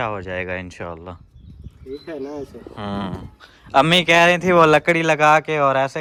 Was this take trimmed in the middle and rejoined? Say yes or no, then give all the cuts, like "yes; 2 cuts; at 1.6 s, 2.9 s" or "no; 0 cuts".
no; 0 cuts